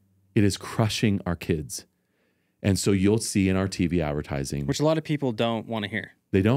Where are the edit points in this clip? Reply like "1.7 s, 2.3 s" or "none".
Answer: none